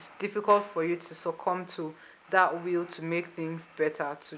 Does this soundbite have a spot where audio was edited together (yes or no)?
no